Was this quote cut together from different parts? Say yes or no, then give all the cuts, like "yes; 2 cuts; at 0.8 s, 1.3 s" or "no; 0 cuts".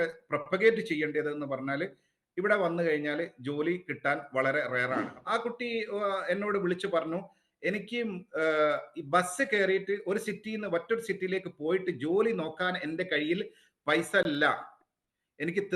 yes; 1 cut; at 5.1 s